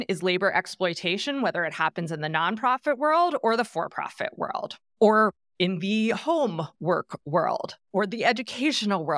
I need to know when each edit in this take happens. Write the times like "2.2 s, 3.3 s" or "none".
none